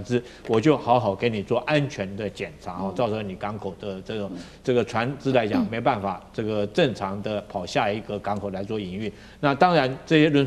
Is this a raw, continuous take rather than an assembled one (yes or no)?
yes